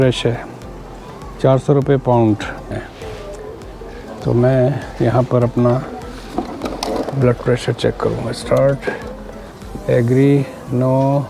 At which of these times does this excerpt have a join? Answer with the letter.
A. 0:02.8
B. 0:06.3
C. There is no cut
A